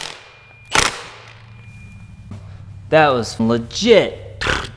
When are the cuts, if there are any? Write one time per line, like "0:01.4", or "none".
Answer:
0:02.3
0:03.3

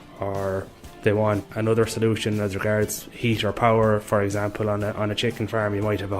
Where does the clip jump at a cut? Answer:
0:01.5

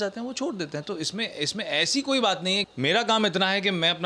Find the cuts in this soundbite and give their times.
0:02.6

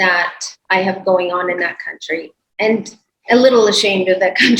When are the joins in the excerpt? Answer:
none

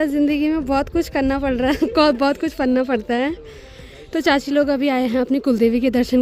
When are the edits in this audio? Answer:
none

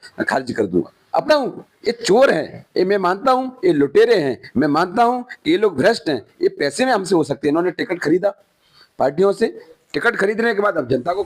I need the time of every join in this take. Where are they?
0:01.2

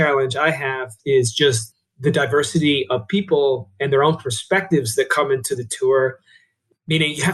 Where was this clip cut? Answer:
0:00.9

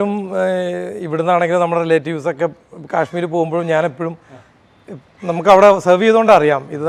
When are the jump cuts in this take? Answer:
none

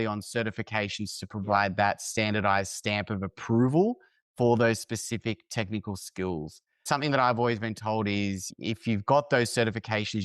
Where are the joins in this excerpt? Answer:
0:06.8

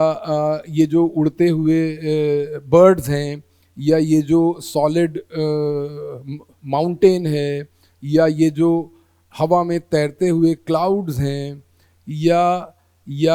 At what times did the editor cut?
none

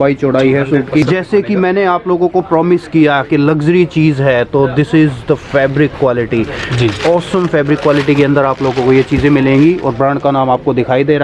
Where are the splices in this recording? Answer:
0:01.0

